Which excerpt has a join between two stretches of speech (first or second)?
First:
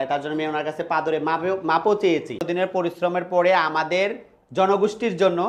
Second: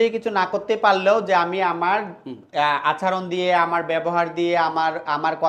first